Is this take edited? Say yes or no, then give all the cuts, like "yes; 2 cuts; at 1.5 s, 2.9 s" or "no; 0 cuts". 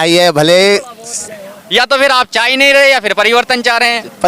yes; 1 cut; at 1.2 s